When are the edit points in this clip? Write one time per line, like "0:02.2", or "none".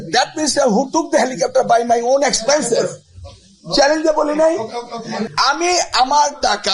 0:05.2

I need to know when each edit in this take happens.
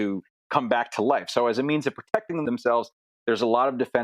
0:02.4

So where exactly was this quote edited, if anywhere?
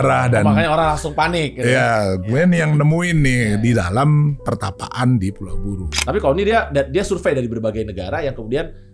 0:05.9

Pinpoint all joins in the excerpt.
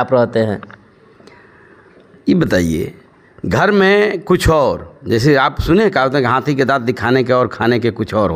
none

